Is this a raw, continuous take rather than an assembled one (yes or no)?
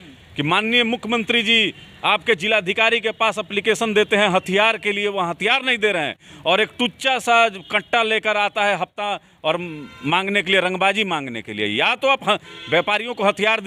yes